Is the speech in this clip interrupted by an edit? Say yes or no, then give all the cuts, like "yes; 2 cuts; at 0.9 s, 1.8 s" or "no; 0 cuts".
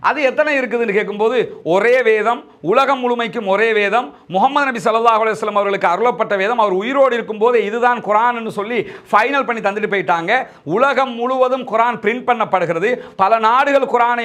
no; 0 cuts